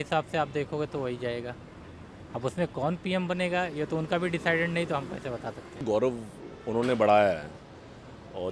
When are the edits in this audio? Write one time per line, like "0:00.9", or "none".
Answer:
0:05.8

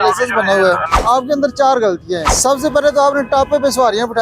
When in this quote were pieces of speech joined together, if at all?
0:00.9
0:02.3

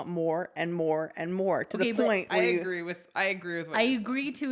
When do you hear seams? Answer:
none

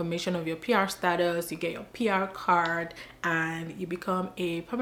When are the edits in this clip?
none

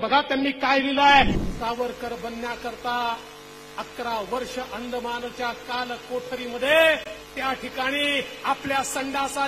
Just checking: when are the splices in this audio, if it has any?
0:01.4

